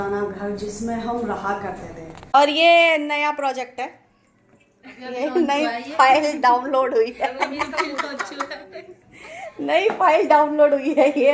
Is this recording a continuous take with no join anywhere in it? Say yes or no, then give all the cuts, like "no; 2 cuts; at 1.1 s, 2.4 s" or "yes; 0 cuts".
no; 1 cut; at 2.3 s